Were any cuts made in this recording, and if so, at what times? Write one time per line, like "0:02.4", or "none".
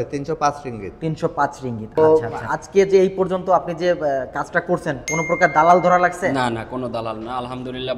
0:02.0